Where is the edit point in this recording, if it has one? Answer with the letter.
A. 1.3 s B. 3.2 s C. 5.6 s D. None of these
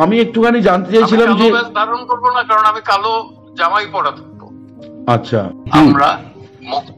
C